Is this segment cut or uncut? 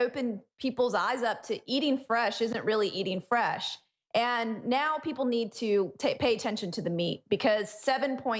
cut